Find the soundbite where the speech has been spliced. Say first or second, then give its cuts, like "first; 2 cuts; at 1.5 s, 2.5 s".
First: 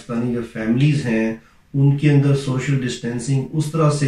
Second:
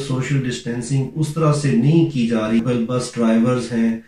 second; 1 cut; at 2.6 s